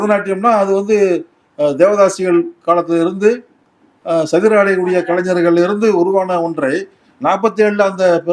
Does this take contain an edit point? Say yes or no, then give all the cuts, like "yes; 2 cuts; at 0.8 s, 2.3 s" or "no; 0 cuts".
no; 0 cuts